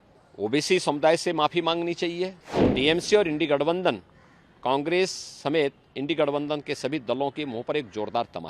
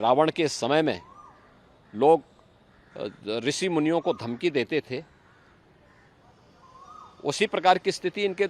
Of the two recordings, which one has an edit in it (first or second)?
first